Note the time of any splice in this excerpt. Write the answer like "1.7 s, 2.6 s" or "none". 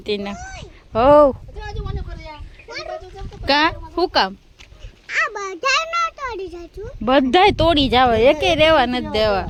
none